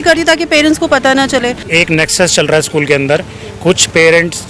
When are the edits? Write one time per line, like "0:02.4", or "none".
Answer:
0:01.6